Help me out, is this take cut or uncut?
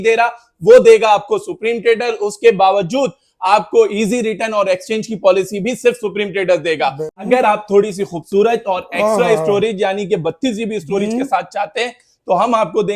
cut